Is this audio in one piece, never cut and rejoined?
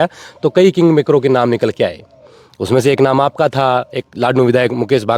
yes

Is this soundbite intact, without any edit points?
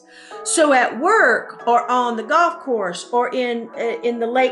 yes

